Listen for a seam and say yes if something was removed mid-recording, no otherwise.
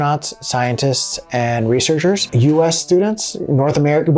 yes